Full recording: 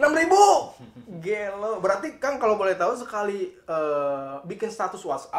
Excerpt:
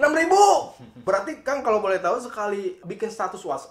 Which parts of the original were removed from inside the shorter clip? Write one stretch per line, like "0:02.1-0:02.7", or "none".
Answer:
0:01.0-0:01.8
0:03.6-0:04.4